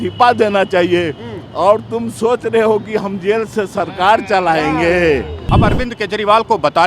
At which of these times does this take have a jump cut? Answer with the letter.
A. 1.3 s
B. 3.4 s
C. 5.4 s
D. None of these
C